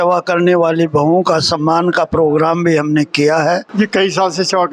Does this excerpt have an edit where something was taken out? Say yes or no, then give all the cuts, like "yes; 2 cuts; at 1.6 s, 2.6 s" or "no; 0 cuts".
yes; 1 cut; at 3.7 s